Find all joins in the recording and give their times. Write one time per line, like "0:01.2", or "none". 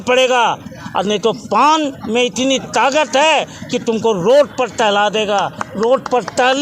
none